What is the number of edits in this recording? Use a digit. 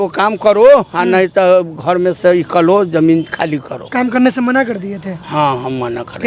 2